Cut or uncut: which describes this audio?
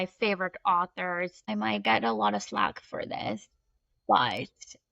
cut